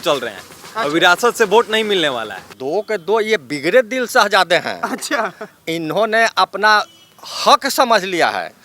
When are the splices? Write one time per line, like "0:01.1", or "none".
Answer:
0:02.4